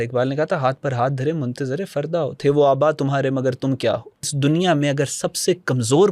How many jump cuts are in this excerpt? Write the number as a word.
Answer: one